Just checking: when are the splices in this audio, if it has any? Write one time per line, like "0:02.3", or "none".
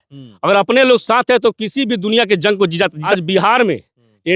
0:03.0

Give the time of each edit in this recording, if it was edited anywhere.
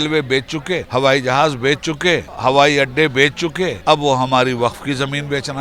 0:00.9
0:02.3
0:03.8

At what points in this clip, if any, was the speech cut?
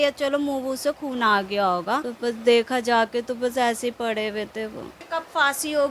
0:02.1
0:04.9

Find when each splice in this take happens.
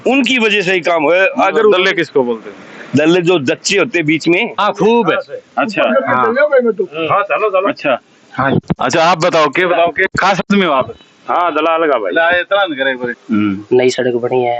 0:04.6
0:13.1

